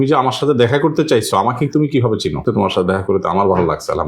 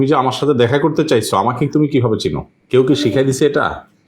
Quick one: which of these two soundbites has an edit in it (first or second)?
first